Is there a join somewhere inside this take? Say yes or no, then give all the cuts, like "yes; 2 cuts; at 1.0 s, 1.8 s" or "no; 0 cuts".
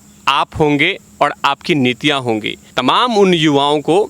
yes; 1 cut; at 2.7 s